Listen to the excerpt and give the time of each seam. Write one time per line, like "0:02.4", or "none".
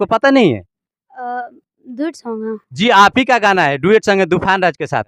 none